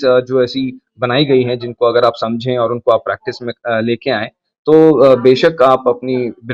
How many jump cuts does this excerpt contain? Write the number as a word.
zero